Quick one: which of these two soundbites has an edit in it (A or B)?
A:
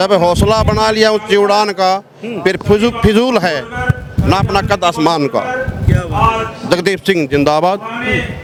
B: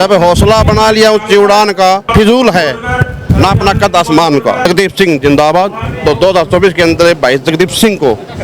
B